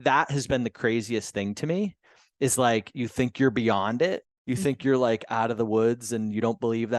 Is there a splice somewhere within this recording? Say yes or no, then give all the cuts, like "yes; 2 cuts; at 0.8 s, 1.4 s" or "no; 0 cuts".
no; 0 cuts